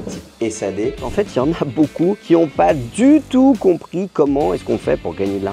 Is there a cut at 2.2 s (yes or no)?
yes